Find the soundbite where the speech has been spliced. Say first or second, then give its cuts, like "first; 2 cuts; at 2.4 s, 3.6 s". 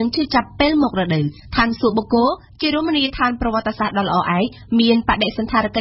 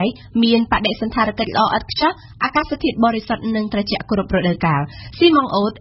first; 1 cut; at 1.4 s